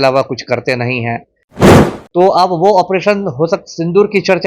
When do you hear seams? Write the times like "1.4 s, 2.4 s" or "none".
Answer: 1.5 s